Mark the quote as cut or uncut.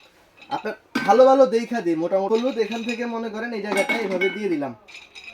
cut